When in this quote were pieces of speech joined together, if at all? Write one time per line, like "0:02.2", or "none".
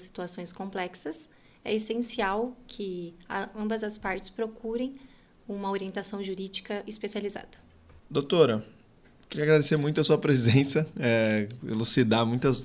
none